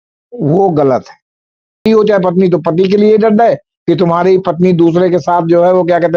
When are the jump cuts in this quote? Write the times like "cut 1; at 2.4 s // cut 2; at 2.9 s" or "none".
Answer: cut 1; at 1.8 s